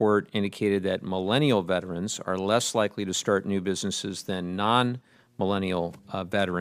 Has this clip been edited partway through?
no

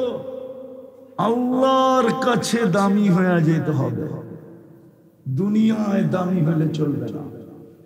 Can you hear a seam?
no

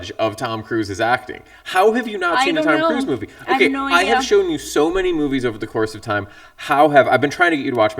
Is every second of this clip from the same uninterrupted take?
yes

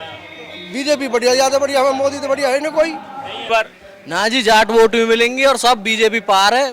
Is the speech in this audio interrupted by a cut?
yes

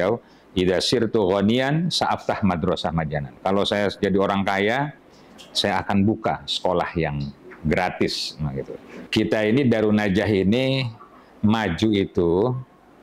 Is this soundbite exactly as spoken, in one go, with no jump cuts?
no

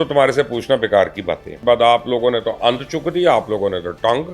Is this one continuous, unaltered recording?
no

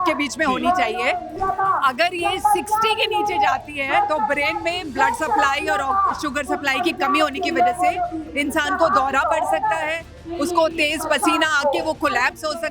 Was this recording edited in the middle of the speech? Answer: yes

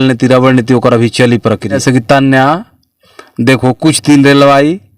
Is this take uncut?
no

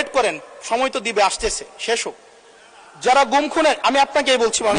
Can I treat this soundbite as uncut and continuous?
yes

